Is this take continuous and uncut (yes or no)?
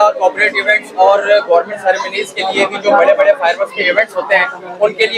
yes